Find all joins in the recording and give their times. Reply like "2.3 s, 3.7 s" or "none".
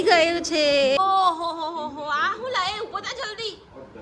1.0 s

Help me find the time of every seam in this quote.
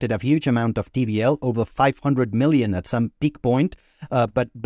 none

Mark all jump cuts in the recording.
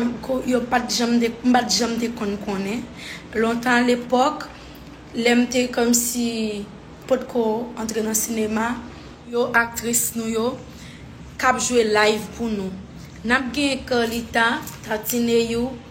9.3 s

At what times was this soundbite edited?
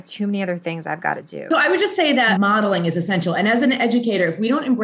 1.4 s, 2.3 s

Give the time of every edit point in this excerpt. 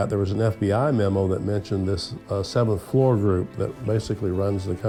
none

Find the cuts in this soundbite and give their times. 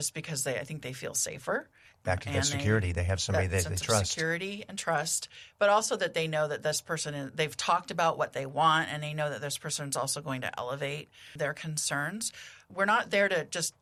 none

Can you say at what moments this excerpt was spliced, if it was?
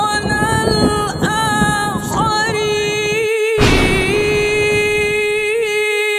none

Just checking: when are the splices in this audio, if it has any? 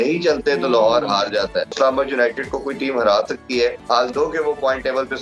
1.8 s, 3.8 s

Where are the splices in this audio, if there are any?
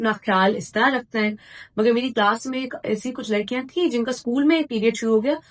none

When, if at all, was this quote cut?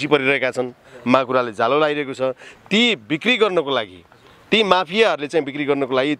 none

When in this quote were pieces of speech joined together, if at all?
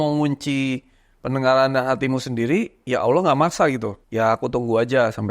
4.0 s

